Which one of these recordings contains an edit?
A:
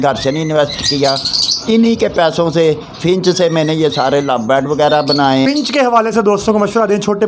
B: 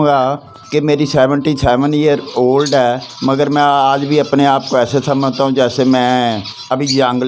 A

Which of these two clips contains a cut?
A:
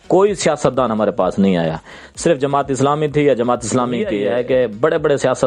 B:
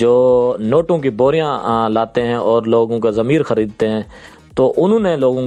A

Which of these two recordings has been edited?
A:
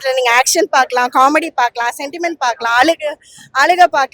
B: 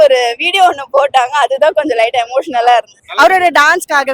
B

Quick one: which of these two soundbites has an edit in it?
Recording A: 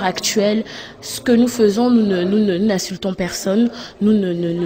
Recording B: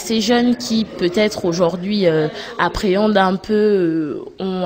B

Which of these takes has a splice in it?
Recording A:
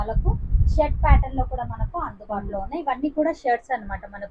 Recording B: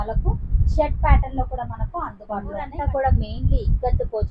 B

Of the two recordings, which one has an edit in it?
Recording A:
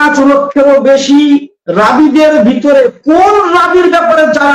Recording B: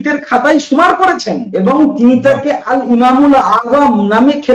B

